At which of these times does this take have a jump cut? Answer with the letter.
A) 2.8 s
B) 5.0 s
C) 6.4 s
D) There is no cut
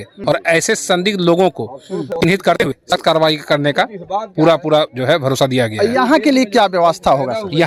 D